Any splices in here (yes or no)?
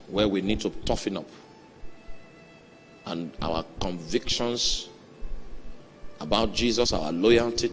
no